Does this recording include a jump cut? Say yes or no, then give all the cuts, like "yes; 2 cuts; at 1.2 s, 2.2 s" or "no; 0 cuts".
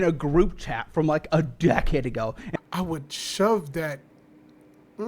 yes; 1 cut; at 2.4 s